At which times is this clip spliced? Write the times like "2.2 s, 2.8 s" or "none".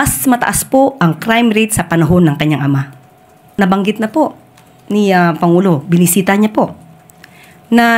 3.5 s